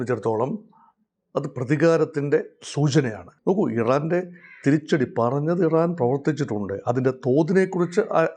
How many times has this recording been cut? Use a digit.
1